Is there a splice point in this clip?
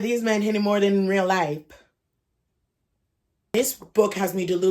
yes; 1 cut; at 3.5 s

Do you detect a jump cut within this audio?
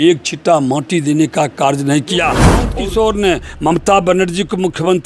yes; 1 cut; at 2.7 s

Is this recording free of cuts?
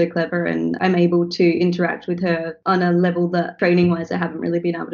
no; 3 cuts; at 0.8 s, 2.5 s, 3.5 s

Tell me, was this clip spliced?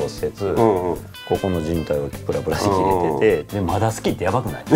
yes; 2 cuts; at 1.1 s, 3.5 s

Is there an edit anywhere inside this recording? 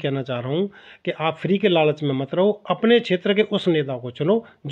no; 0 cuts

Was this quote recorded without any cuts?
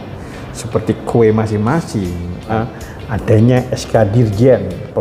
no; 1 cut; at 2.5 s

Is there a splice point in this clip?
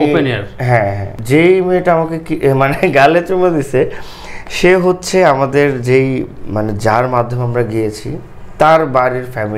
yes; 1 cut; at 1.1 s

